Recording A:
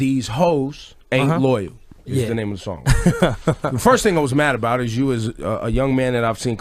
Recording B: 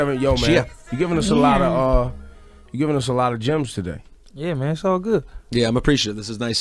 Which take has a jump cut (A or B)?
A